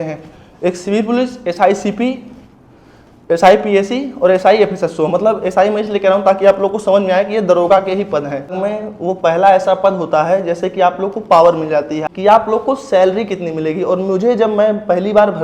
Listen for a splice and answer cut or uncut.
cut